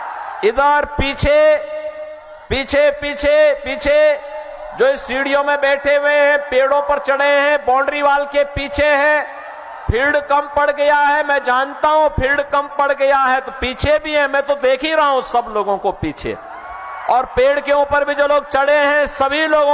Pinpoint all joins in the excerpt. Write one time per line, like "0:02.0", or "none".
none